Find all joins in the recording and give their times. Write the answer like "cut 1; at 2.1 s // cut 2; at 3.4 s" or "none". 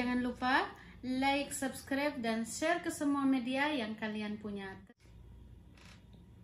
cut 1; at 4.7 s